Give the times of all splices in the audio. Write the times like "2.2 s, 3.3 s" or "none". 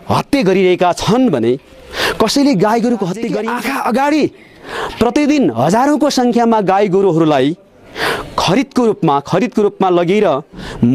3.4 s

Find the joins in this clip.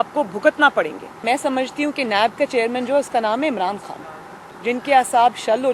1.2 s, 4.4 s

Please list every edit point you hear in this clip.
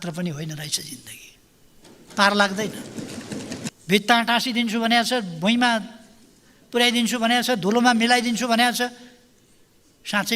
3.7 s

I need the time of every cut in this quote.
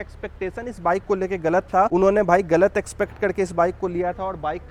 none

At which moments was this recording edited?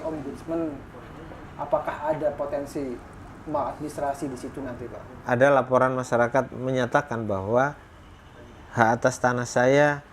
5.1 s

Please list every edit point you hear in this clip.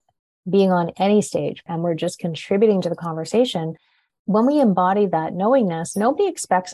1.6 s

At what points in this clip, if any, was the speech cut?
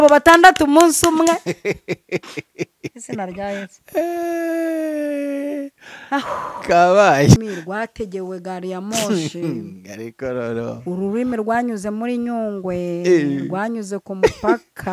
7.4 s

